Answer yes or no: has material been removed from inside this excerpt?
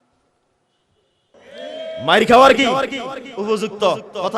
yes